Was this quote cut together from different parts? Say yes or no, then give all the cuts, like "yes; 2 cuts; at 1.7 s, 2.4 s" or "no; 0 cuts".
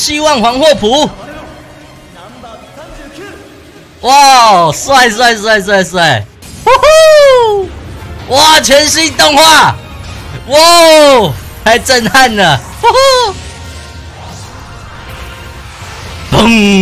no; 0 cuts